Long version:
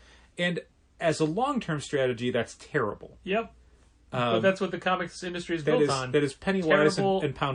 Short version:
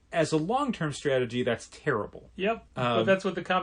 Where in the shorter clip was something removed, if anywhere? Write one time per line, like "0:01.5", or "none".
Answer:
0:02.7